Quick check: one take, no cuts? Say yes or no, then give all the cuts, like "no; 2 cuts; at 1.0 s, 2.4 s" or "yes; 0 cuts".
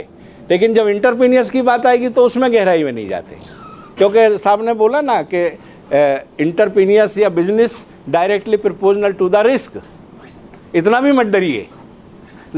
yes; 0 cuts